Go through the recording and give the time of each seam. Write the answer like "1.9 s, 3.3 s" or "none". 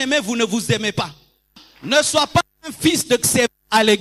1.7 s